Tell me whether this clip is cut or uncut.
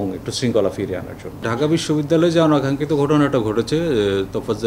cut